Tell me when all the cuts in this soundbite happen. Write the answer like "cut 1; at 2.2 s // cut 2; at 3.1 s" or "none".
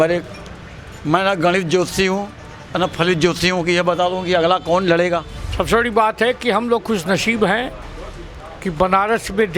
cut 1; at 5.4 s